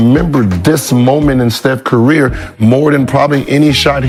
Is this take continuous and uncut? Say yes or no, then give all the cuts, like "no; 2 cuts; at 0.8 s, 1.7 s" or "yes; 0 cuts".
yes; 0 cuts